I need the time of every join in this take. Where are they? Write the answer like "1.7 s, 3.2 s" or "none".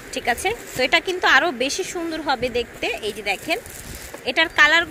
none